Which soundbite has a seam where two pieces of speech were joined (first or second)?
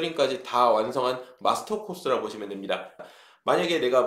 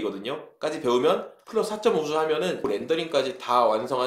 first